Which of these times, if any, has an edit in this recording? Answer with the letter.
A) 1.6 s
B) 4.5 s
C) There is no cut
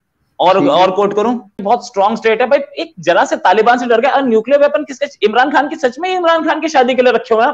A